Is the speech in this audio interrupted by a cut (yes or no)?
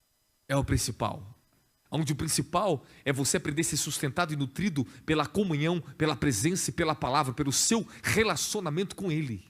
no